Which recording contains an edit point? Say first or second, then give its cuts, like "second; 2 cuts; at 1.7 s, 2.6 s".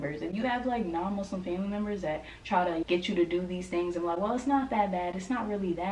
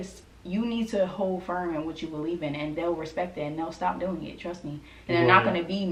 first; 1 cut; at 2.6 s